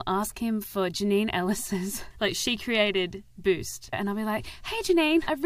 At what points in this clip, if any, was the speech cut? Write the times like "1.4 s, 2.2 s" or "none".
2.0 s, 3.9 s